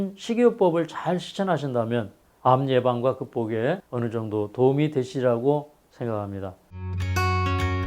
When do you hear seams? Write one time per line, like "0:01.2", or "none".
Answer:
0:03.9
0:06.8